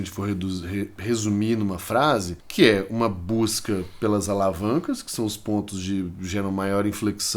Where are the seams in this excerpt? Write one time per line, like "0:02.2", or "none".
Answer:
0:02.4